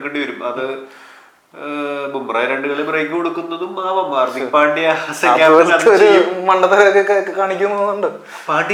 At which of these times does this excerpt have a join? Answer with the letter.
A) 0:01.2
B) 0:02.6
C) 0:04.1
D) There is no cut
D